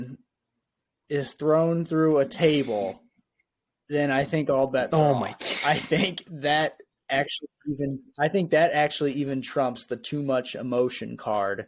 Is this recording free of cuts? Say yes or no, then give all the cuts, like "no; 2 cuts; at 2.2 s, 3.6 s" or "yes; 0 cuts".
yes; 0 cuts